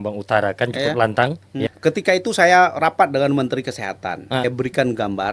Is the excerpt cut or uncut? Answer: cut